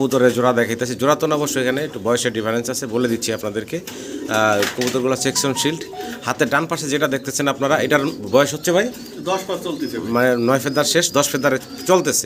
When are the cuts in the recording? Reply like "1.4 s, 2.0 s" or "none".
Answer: none